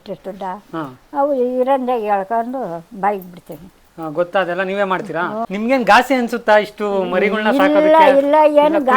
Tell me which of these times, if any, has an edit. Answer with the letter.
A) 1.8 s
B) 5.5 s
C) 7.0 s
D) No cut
B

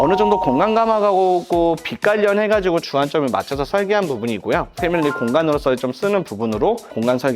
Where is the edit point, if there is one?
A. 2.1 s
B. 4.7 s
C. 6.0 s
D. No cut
B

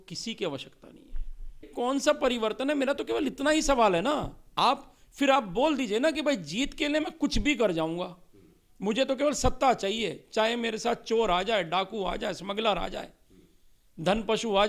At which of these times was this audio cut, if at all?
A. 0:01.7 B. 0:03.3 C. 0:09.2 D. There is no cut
A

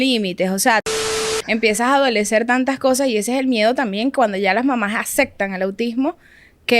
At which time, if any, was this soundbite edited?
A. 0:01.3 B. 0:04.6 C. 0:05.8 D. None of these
A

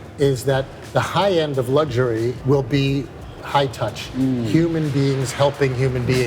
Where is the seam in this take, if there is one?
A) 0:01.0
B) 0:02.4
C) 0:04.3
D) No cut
B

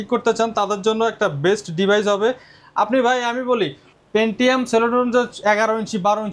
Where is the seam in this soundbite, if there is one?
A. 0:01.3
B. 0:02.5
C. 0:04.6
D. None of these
D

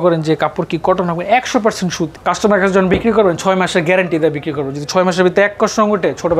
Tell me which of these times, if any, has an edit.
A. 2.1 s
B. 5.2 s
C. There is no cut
A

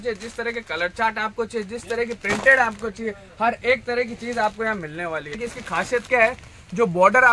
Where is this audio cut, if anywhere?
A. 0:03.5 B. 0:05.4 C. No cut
B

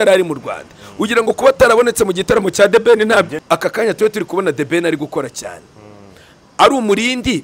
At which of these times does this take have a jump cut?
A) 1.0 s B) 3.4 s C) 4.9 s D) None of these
B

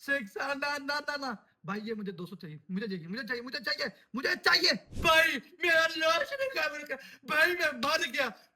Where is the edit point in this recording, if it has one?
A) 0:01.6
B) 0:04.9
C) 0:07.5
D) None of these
B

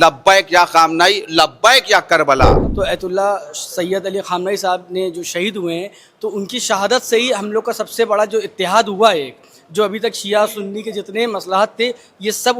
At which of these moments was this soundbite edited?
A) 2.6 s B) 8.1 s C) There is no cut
A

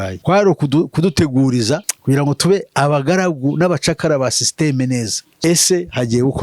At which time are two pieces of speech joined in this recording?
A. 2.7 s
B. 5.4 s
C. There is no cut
B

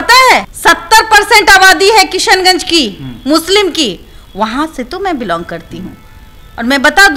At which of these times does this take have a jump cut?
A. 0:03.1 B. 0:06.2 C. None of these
C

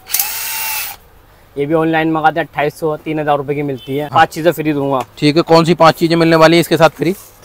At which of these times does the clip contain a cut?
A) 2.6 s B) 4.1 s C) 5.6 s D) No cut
B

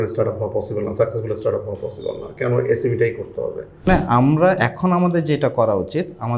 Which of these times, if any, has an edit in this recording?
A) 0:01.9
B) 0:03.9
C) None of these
B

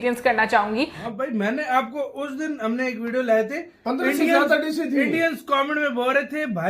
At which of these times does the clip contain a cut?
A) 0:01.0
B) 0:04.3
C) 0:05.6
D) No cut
A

